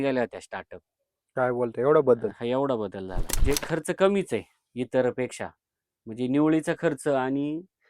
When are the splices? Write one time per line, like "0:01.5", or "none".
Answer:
0:03.4